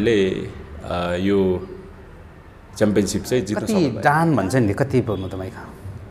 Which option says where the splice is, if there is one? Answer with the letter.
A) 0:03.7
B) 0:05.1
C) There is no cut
A